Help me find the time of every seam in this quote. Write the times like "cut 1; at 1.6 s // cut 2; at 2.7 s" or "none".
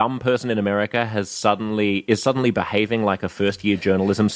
none